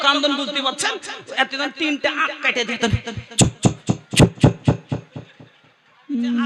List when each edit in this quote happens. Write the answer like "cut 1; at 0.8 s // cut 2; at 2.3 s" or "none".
none